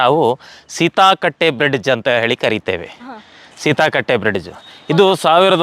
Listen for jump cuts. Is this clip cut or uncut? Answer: uncut